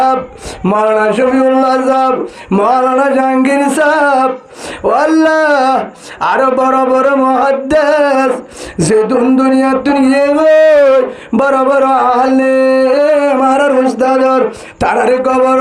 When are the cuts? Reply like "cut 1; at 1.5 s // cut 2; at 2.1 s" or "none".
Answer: none